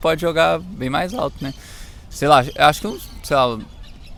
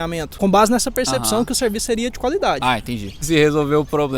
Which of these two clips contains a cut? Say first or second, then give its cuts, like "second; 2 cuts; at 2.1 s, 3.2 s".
second; 1 cut; at 3.1 s